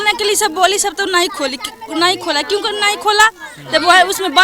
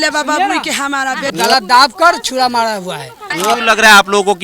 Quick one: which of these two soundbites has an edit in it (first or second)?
second